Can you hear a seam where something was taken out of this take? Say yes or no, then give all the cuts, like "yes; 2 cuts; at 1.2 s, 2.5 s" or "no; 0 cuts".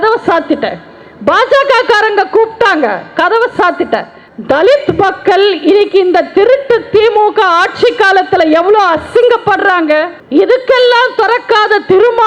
yes; 2 cuts; at 4.3 s, 10.1 s